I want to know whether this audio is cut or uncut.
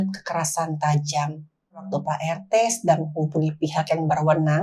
cut